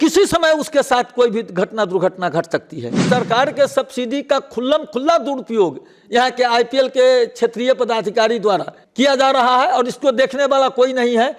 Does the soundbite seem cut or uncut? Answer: cut